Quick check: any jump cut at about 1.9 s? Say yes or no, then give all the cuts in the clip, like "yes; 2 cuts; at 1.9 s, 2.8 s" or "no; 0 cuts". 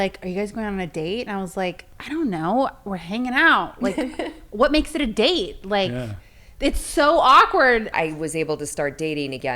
yes; 2 cuts; at 1.9 s, 7.9 s